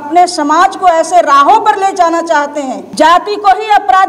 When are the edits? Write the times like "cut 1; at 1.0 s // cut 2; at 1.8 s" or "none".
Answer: cut 1; at 2.8 s